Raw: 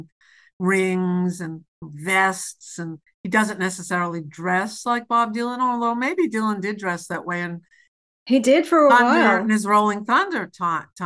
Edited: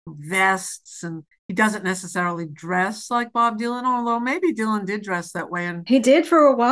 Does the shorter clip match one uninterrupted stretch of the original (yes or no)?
no